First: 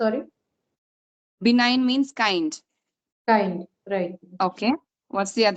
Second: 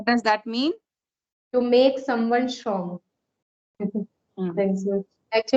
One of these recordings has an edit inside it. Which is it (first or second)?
second